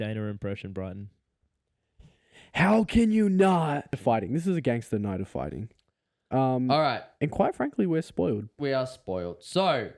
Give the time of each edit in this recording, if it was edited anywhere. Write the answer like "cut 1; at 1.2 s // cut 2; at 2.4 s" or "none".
cut 1; at 4.0 s